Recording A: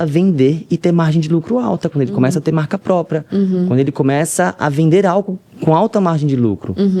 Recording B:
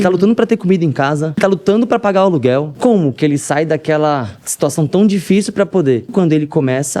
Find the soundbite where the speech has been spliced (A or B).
B